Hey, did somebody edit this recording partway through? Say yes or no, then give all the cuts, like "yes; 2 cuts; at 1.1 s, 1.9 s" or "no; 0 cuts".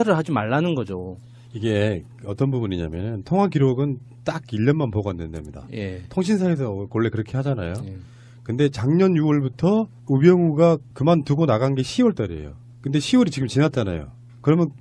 yes; 1 cut; at 3.1 s